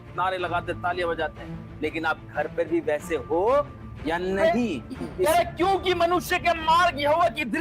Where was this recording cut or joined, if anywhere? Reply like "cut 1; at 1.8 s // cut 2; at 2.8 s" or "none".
cut 1; at 5.2 s

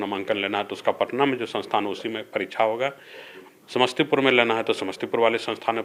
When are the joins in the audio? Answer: none

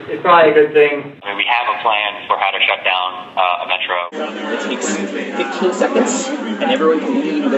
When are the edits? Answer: cut 1; at 1.2 s // cut 2; at 4.1 s

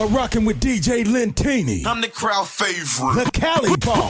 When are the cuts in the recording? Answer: none

